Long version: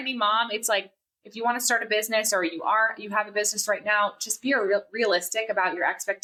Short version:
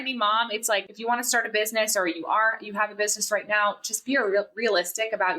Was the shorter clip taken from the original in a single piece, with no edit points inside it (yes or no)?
no